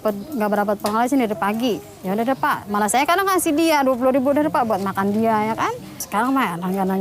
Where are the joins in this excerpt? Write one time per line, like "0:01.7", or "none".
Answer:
0:06.0